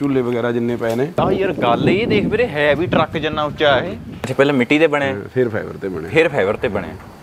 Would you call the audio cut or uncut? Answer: cut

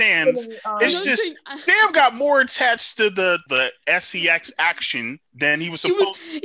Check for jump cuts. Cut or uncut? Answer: cut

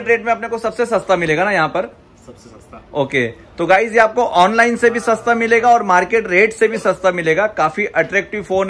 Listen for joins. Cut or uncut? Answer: uncut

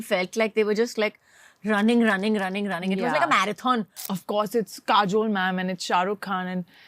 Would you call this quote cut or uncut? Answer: cut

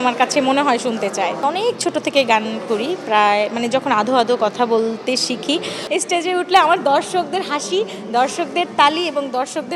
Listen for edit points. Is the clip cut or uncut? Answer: cut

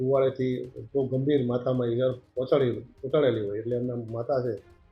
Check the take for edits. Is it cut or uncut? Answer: uncut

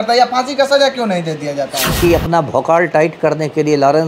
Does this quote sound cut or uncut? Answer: cut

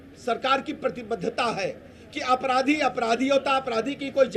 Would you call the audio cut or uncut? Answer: uncut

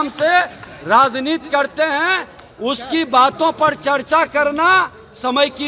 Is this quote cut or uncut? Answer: uncut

